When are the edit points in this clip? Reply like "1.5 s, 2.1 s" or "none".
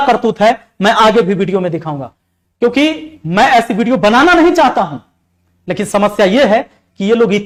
none